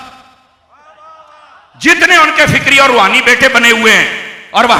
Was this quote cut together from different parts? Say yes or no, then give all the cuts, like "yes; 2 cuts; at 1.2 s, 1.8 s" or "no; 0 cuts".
no; 0 cuts